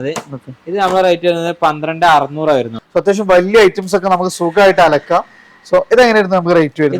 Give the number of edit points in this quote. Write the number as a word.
one